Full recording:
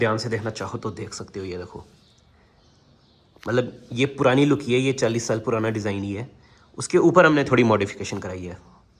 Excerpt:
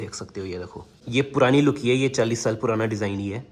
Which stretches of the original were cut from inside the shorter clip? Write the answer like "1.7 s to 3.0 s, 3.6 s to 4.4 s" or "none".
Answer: 2.0 s to 3.8 s